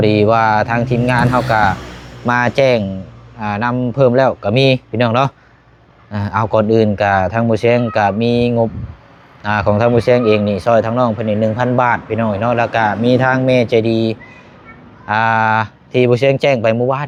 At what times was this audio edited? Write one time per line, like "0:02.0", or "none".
none